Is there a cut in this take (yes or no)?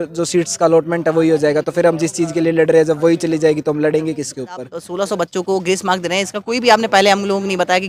yes